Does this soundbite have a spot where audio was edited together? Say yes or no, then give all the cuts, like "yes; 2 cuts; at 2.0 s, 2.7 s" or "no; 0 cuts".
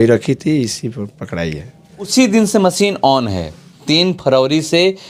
yes; 1 cut; at 2.1 s